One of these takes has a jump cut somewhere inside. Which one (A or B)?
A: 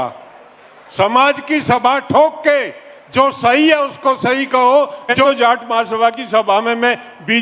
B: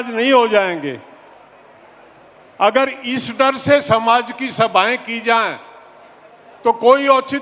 A